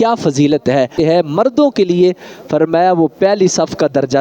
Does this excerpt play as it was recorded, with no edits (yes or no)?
no